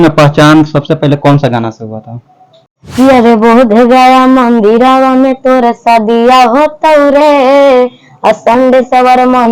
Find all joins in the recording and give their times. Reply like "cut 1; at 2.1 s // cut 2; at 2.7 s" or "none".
cut 1; at 2.8 s

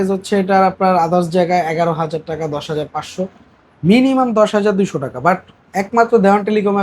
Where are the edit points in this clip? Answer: none

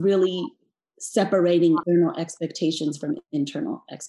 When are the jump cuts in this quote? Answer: cut 1; at 1.8 s

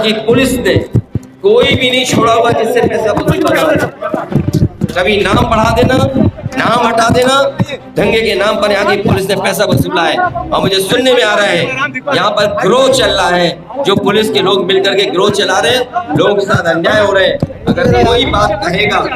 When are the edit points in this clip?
none

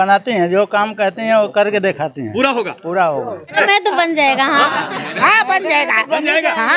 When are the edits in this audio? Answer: cut 1; at 3.6 s

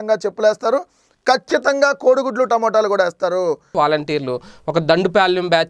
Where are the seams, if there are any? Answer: cut 1; at 3.7 s

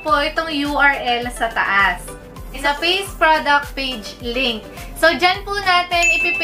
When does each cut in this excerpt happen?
cut 1; at 2.6 s

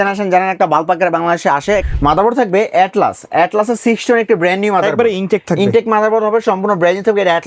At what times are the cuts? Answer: cut 1; at 1.8 s

